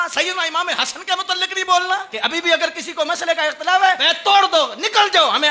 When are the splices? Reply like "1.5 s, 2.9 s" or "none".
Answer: 2.1 s, 4.1 s